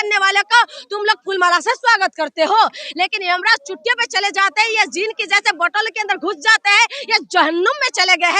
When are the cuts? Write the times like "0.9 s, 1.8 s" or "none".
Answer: 2.8 s